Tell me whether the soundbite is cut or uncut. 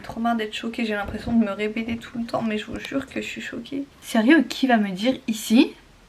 uncut